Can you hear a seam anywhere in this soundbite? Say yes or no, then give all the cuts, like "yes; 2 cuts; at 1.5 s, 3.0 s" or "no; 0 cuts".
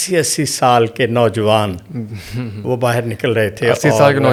no; 0 cuts